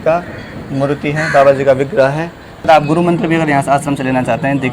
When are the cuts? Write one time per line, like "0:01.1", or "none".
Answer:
0:02.6